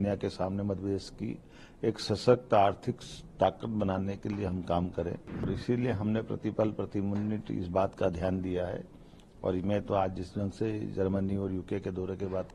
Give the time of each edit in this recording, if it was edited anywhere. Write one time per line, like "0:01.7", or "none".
0:05.5